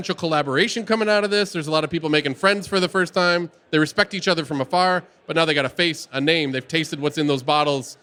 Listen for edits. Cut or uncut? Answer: uncut